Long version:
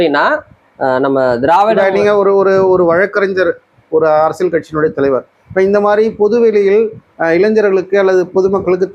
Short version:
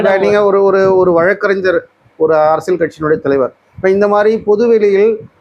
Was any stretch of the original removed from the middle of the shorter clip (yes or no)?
no